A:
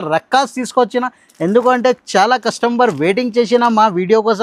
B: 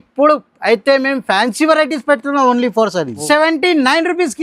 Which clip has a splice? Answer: B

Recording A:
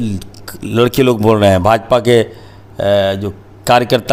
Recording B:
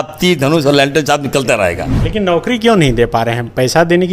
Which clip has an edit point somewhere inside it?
B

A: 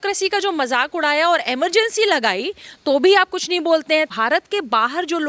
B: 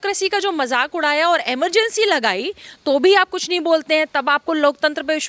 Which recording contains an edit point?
A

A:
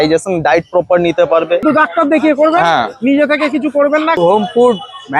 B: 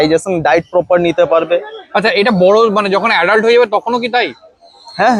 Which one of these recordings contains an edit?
A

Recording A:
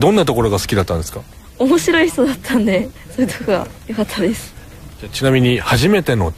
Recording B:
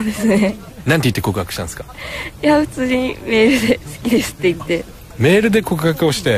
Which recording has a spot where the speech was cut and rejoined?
A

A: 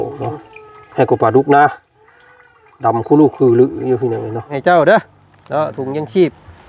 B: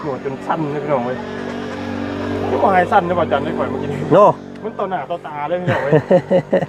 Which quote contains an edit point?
A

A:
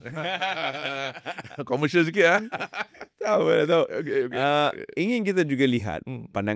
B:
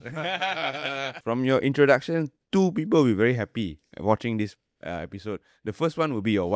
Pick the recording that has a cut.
B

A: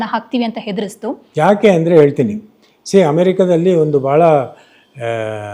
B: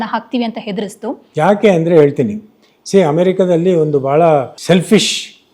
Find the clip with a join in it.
B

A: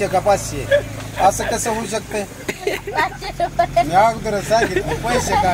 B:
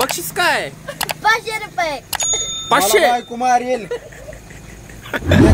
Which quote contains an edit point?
A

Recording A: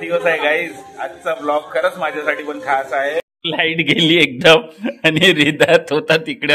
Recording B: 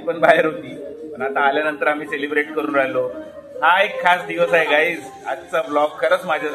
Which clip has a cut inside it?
A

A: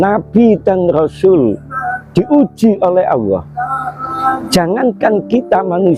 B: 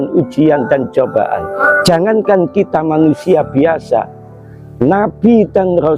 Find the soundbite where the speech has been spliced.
B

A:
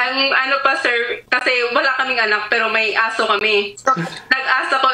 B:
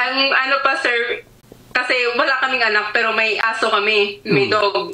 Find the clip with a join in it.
A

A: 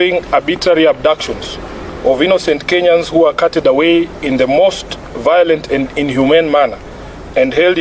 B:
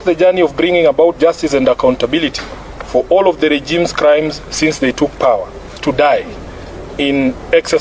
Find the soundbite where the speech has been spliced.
B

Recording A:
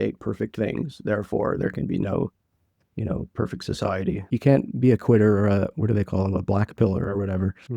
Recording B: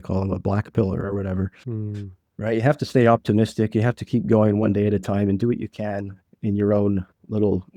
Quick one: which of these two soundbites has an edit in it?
A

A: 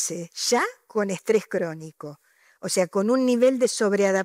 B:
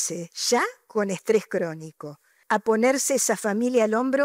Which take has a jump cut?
B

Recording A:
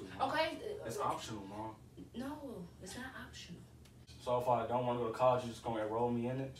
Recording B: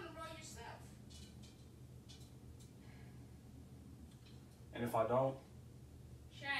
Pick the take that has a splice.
A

